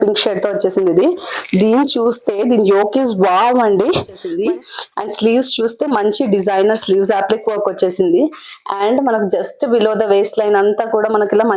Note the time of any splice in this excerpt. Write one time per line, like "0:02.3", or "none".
0:04.2